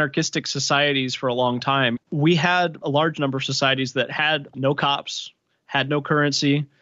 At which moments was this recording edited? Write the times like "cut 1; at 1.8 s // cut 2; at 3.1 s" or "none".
cut 1; at 2.0 s // cut 2; at 2.8 s // cut 3; at 4.5 s